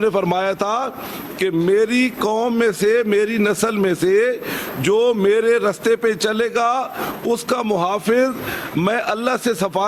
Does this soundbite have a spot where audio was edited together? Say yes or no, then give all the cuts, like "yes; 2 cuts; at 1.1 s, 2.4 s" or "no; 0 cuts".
no; 0 cuts